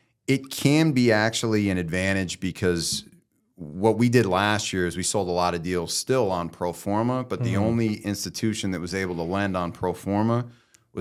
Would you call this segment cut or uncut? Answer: uncut